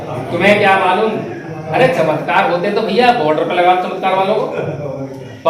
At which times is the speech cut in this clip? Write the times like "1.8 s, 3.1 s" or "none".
none